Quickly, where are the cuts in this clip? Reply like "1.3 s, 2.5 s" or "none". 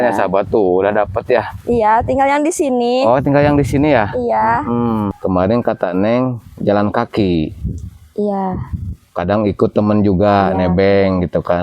5.1 s